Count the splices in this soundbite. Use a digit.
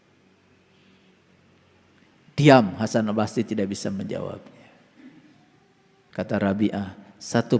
1